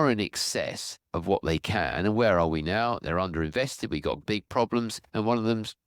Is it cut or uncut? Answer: uncut